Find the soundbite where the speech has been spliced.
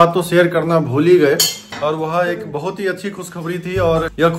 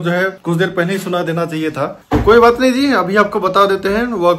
second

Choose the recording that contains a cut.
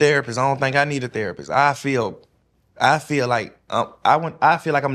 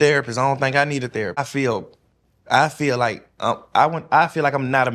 second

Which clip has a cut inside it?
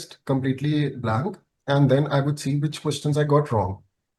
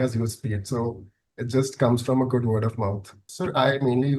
second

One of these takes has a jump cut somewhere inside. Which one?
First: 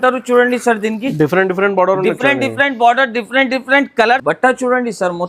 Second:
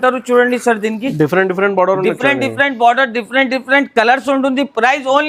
first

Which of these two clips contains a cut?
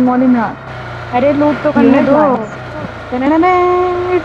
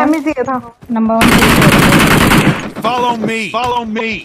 first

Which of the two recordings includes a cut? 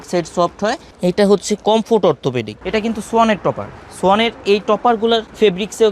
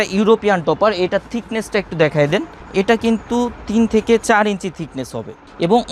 first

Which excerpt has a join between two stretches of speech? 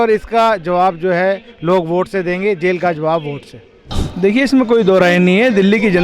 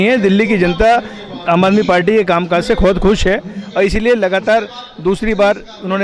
first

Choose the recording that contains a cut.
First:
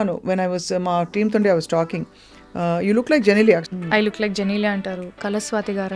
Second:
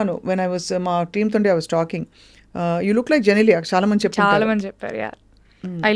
first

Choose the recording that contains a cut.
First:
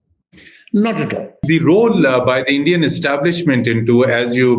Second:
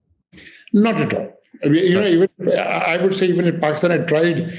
first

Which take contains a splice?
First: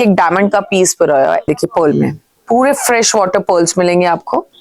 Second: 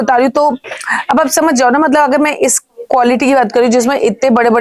first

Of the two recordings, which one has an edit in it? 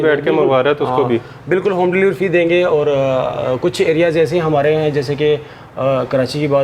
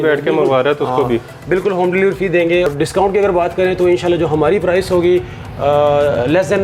second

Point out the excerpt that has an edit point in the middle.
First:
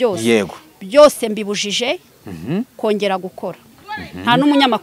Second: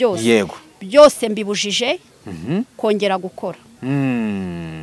first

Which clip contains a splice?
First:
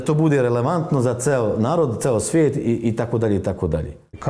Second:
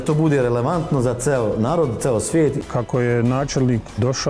second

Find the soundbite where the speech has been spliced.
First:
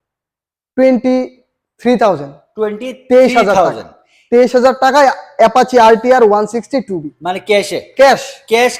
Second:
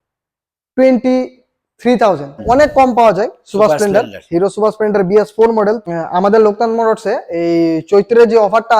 second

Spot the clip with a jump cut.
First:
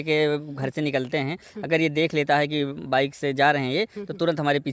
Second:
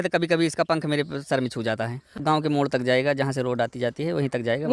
second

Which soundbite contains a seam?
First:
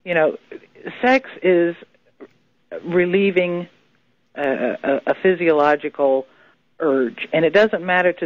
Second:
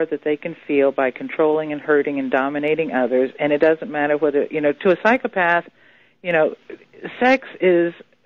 second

